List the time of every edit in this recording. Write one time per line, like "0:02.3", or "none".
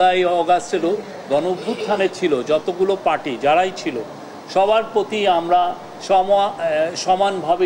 none